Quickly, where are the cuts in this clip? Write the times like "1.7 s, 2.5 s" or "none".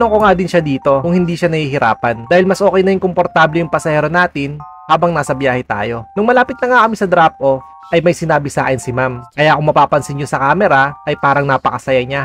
9.2 s